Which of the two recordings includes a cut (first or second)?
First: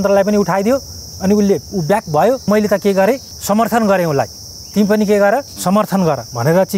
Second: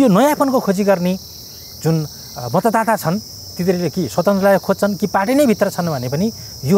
first